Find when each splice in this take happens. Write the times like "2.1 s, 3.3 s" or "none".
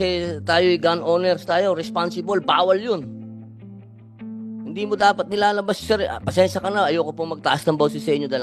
3.5 s, 4.7 s